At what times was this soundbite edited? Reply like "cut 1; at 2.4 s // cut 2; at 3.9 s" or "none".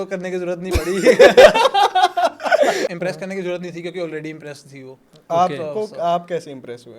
none

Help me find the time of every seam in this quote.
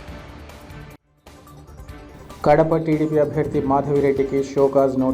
cut 1; at 2.1 s

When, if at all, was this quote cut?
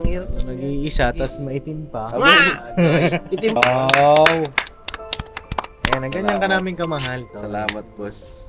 cut 1; at 3.6 s

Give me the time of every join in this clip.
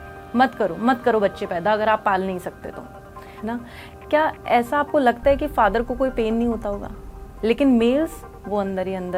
cut 1; at 3.4 s // cut 2; at 7.3 s

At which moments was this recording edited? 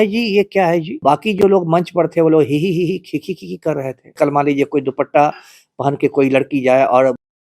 cut 1; at 1.0 s // cut 2; at 4.1 s

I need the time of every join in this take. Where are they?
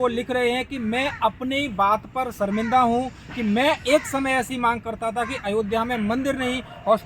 none

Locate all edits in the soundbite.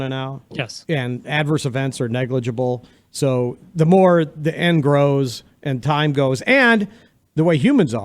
none

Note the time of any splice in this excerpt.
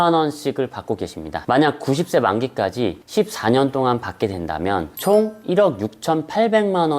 cut 1; at 1.3 s

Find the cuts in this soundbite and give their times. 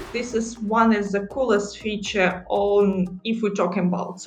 none

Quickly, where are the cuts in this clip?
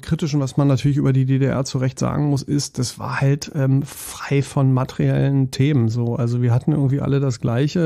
none

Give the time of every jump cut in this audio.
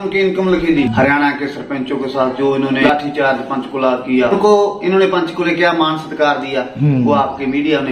cut 1; at 0.9 s // cut 2; at 2.8 s // cut 3; at 4.3 s

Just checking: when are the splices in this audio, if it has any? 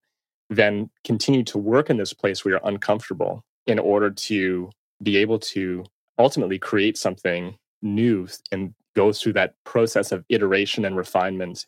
cut 1; at 3.5 s // cut 2; at 5.9 s // cut 3; at 7.8 s

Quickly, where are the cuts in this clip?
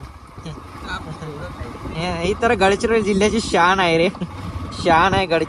none

